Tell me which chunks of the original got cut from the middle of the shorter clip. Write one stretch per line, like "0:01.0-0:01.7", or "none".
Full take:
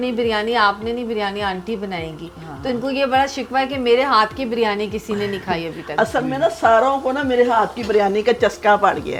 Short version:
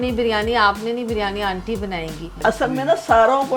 0:02.3-0:05.8